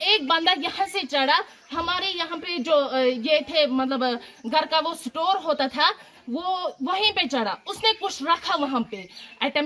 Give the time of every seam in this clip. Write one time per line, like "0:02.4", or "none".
none